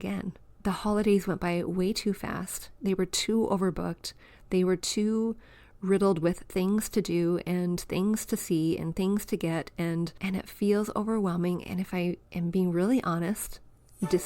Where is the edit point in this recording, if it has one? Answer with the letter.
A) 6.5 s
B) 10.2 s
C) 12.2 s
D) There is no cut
B